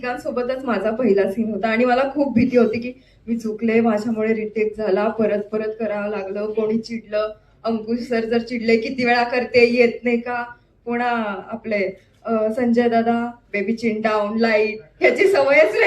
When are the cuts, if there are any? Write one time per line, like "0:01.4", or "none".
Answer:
none